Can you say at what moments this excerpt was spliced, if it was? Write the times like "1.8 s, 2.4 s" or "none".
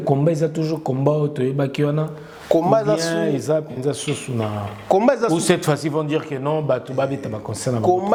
none